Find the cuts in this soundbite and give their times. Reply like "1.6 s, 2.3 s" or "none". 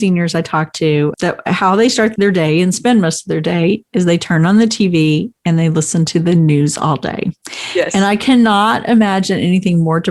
1.1 s, 2.1 s